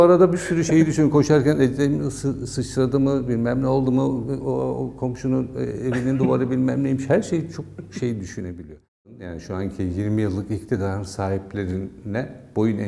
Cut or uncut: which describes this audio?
cut